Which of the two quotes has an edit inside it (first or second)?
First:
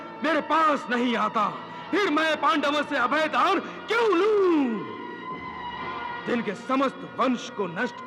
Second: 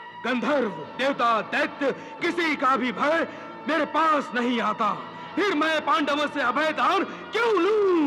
first